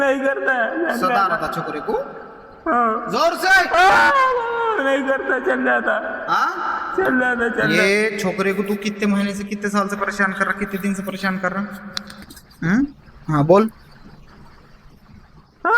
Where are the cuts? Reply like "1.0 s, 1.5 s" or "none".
7.7 s